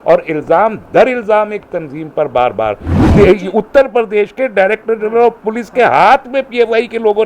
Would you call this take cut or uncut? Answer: cut